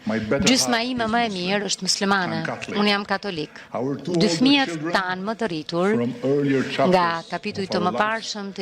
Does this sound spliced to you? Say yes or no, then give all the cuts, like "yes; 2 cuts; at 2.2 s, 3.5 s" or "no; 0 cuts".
no; 0 cuts